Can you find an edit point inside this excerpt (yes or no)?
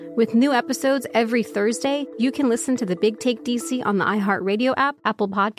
no